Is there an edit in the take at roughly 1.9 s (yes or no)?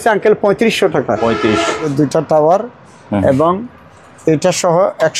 yes